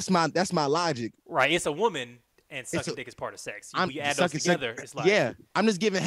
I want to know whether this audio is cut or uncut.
cut